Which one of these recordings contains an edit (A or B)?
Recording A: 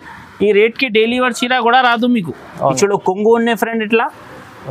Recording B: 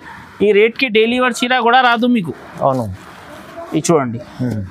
A